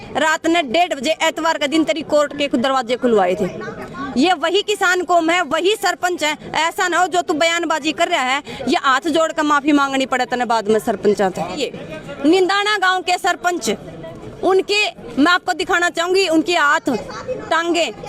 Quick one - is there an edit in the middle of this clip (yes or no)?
yes